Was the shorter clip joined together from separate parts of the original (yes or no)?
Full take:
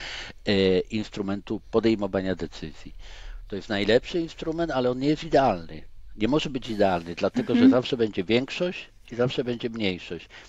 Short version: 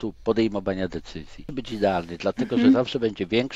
yes